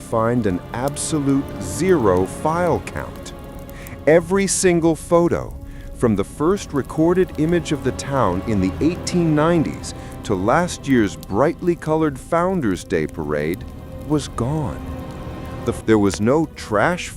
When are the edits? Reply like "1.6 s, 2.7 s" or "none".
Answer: 15.8 s